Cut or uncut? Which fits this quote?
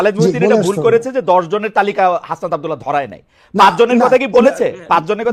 uncut